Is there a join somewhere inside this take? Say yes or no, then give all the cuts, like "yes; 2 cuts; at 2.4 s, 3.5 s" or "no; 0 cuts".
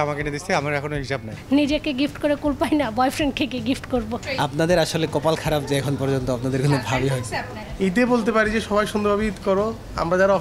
yes; 3 cuts; at 1.3 s, 4.2 s, 7.6 s